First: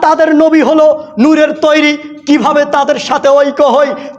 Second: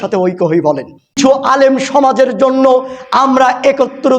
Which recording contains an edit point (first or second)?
second